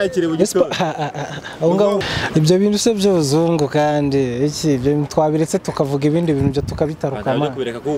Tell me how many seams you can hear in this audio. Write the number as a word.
one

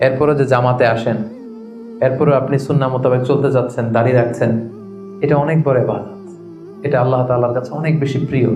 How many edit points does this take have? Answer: zero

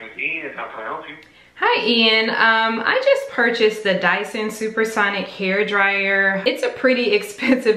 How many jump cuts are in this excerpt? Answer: one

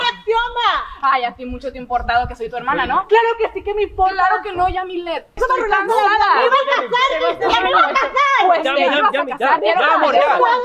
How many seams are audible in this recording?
one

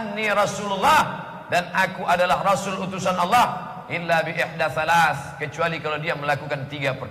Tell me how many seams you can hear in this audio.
zero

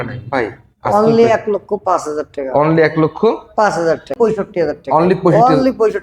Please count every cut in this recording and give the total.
one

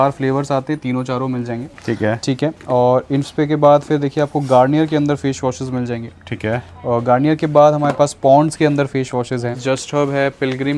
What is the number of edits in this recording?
one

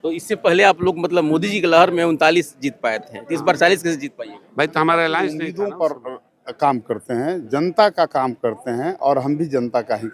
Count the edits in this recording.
one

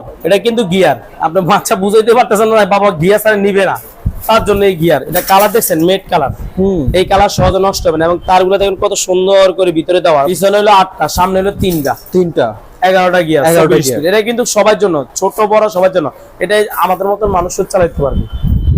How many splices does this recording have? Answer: two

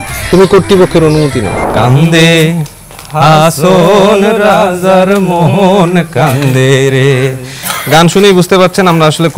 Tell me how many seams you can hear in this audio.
one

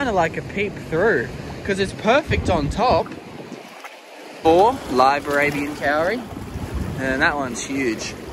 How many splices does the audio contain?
one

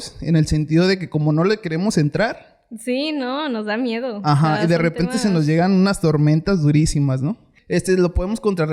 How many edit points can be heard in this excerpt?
one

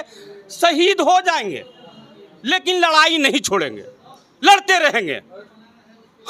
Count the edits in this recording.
zero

